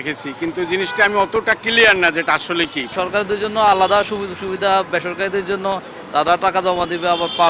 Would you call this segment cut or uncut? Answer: uncut